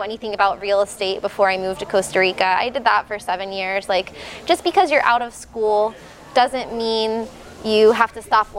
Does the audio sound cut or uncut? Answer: uncut